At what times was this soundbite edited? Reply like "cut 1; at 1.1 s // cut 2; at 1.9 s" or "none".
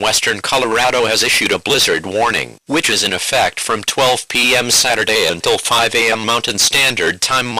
cut 1; at 1.6 s // cut 2; at 2.8 s